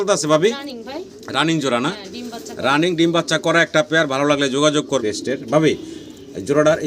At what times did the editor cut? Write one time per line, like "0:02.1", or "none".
0:05.0